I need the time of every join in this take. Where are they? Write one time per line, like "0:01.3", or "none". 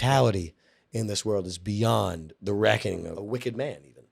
0:03.2